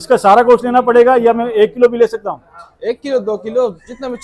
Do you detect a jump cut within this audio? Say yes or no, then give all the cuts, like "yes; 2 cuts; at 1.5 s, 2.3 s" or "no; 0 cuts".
no; 0 cuts